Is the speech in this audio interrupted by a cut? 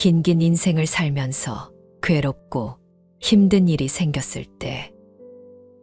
no; 0 cuts

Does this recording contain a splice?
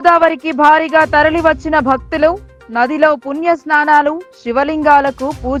no; 0 cuts

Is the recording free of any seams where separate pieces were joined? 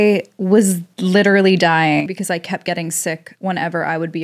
no; 1 cut; at 2.1 s

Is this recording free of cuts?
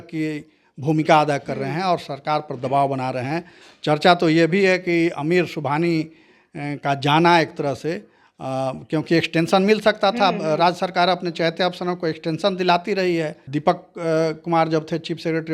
no; 1 cut; at 13.4 s

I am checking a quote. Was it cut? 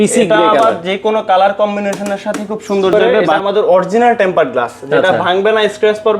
yes; 1 cut; at 3.3 s

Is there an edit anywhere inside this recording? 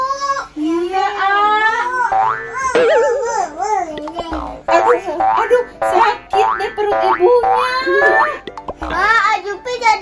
no; 0 cuts

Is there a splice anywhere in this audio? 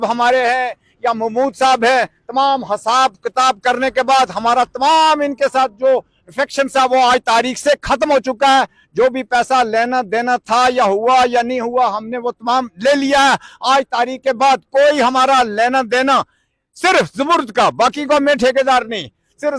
no; 0 cuts

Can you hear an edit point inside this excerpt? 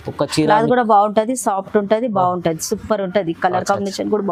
no; 0 cuts

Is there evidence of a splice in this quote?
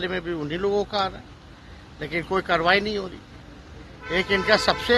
no; 0 cuts

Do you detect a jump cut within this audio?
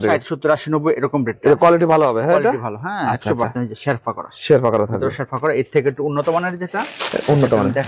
no; 0 cuts

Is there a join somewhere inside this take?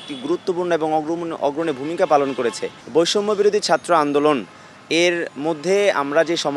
yes; 1 cut; at 2.8 s

